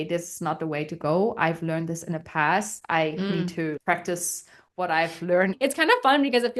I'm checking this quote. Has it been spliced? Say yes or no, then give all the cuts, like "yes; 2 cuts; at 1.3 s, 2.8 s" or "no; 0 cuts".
yes; 1 cut; at 5.6 s